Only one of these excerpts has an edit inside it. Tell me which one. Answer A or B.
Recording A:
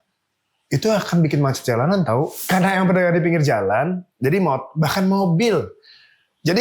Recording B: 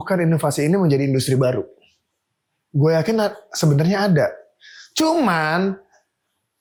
A